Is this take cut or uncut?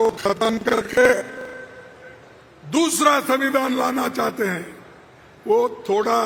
uncut